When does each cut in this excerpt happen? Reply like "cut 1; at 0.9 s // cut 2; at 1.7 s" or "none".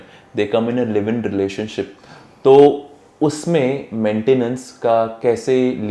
none